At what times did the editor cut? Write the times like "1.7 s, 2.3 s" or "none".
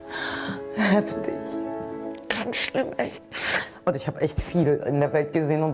2.1 s